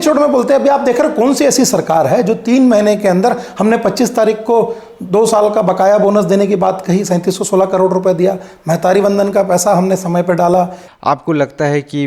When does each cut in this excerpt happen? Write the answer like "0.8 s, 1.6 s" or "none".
10.8 s